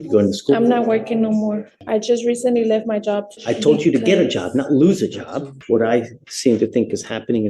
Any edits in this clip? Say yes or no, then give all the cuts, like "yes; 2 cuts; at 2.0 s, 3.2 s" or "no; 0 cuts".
yes; 3 cuts; at 1.7 s, 3.3 s, 5.5 s